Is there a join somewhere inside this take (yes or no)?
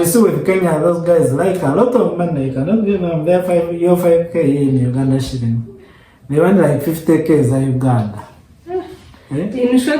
no